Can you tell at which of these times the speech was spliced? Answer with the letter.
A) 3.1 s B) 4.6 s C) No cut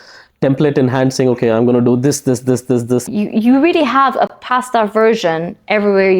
A